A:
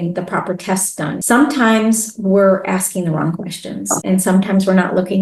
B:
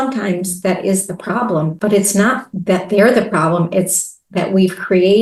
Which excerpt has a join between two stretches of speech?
A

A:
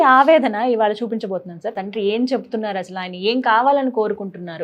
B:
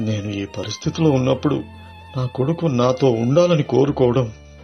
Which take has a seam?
A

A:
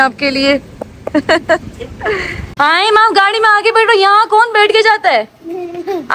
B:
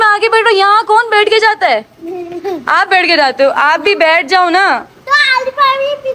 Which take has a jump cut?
A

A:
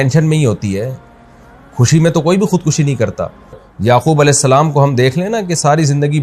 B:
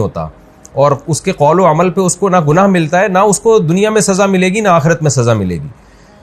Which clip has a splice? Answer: A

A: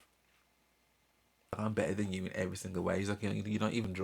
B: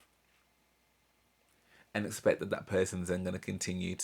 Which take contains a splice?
A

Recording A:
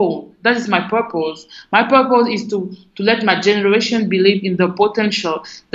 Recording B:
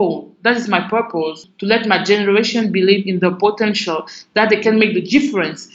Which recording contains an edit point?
B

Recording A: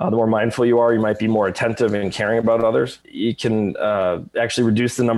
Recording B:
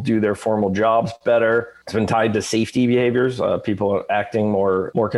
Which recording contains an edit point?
B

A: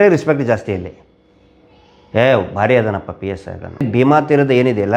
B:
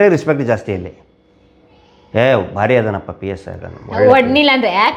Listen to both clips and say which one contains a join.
A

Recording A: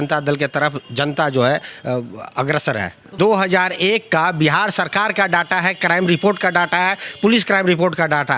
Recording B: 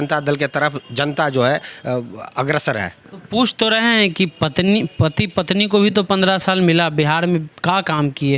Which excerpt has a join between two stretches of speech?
A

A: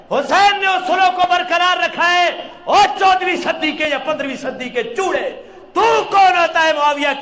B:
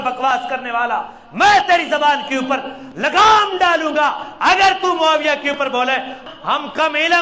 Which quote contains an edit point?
B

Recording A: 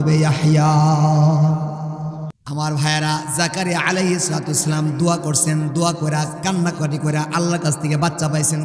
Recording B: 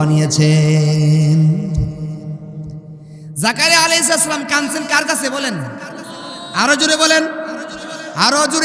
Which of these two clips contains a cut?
A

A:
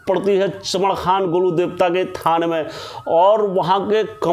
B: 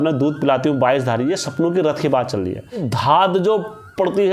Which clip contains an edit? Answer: B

